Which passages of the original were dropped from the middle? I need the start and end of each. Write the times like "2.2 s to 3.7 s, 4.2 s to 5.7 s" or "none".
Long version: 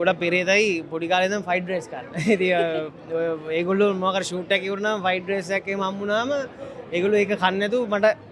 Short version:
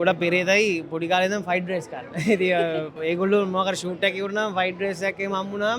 3.0 s to 3.4 s